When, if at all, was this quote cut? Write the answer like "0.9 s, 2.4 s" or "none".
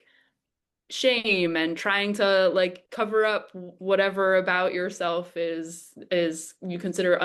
none